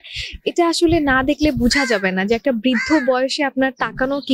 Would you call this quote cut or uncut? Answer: uncut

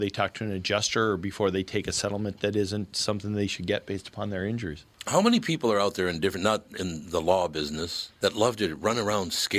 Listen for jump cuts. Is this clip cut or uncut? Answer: uncut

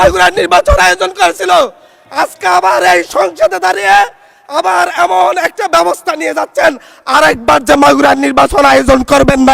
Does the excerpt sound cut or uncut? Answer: uncut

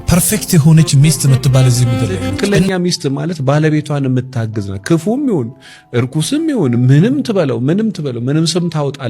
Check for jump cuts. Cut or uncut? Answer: cut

